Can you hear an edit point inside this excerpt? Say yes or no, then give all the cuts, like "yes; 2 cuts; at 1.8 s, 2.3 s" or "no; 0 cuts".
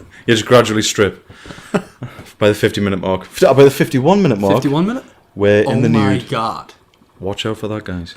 yes; 1 cut; at 6.4 s